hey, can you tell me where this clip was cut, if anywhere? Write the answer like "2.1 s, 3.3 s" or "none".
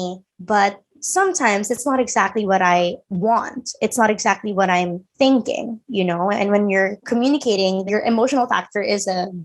7.0 s, 7.9 s